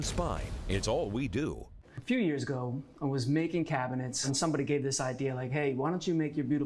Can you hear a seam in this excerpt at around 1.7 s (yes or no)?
yes